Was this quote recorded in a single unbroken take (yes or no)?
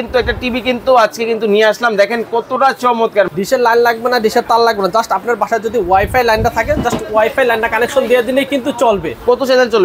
no